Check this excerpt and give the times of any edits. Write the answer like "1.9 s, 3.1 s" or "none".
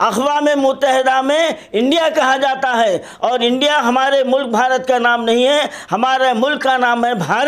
none